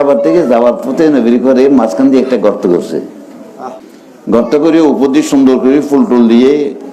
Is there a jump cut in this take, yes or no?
no